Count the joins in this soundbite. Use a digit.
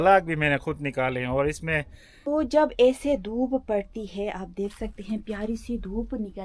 1